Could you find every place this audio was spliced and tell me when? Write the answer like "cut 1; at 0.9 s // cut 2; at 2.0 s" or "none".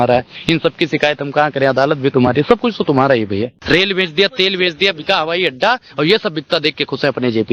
cut 1; at 3.6 s